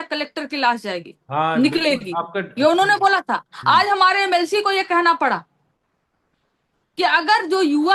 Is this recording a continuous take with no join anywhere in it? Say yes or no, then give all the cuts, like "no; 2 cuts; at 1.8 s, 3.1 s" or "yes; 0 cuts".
yes; 0 cuts